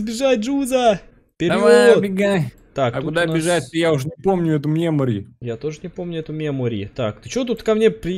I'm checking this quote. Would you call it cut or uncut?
uncut